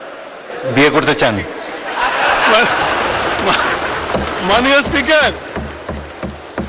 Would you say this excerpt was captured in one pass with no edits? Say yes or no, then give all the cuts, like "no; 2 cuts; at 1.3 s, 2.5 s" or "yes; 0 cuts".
yes; 0 cuts